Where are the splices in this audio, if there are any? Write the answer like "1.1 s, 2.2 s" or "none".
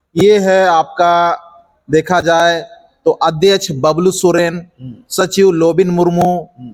none